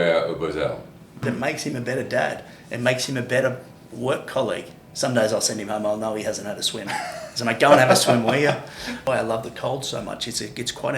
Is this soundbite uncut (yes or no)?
no